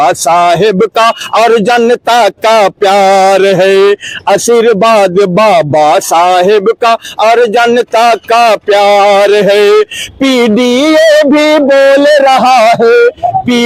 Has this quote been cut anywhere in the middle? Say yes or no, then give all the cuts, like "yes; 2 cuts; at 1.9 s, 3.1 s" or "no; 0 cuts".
no; 0 cuts